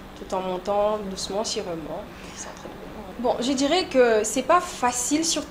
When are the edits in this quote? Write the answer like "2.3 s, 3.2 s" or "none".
3.1 s